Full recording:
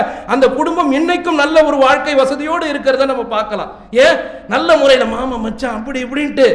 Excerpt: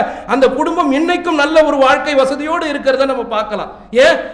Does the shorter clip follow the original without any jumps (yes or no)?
yes